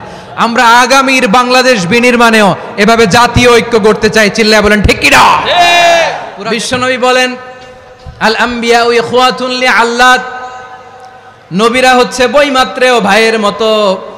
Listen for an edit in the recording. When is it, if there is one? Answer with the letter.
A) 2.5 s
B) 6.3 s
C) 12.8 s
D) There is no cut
B